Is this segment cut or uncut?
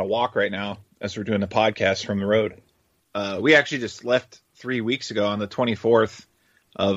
cut